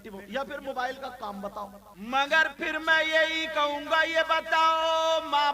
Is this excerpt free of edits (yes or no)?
no